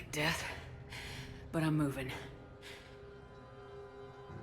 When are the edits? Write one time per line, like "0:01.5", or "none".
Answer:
0:02.2